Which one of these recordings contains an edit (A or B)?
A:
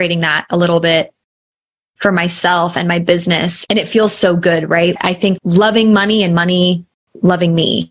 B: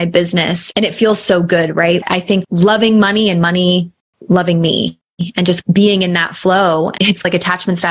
B